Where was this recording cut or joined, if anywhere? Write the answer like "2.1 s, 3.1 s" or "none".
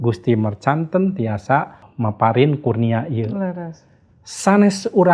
1.9 s